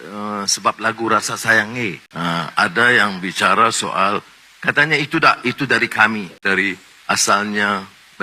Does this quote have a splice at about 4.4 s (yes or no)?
no